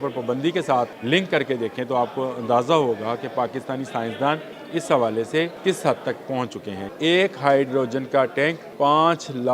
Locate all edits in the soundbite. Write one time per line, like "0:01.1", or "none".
0:01.0
0:04.5
0:05.5
0:06.8
0:08.6